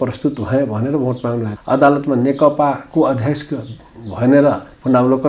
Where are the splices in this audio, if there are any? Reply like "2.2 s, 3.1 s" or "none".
1.5 s